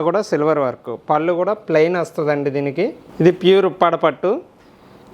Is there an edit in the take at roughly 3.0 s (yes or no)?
yes